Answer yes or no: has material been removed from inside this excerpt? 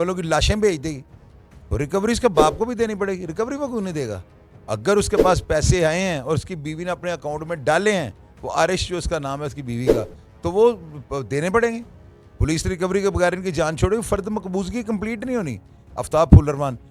yes